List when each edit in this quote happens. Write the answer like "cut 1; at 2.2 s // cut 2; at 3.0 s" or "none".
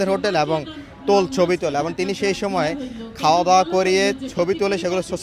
none